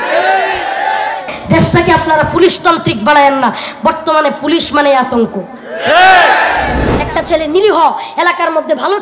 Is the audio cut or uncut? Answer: cut